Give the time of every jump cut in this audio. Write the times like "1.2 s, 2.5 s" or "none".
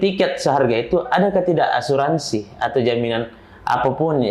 none